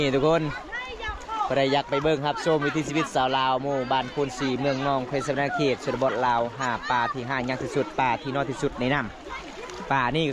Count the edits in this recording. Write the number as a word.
zero